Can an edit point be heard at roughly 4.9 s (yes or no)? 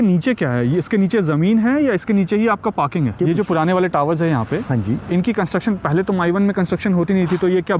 no